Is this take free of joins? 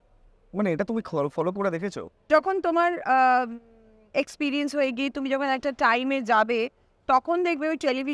no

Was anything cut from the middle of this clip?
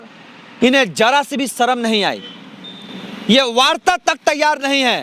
no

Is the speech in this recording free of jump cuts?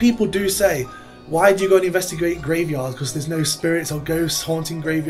yes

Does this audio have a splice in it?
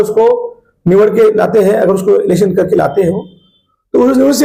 no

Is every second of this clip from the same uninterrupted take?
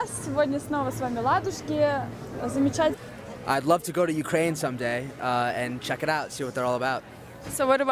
yes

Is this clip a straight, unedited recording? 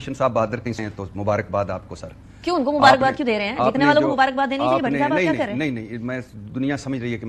yes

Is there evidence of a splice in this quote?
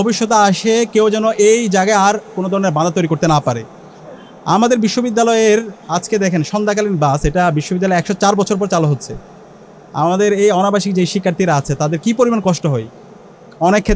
no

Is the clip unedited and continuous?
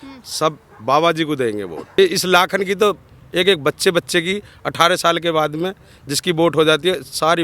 no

